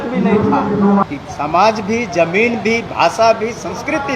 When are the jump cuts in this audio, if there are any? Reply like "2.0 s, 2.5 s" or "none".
1.1 s